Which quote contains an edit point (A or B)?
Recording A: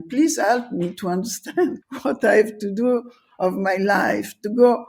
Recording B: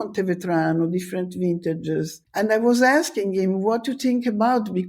B